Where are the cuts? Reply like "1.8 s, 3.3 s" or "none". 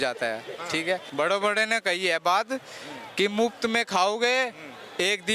1.1 s